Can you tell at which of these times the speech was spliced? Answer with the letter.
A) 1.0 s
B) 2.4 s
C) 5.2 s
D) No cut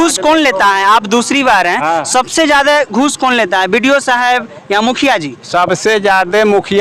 D